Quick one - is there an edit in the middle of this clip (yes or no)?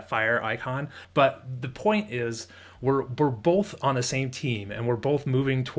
yes